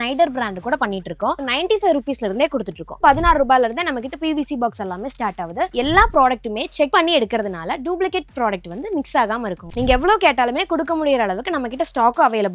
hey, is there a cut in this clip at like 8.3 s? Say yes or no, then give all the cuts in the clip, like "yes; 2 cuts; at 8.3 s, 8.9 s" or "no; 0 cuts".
no; 5 cuts; at 1.4 s, 2.9 s, 5.7 s, 6.9 s, 9.7 s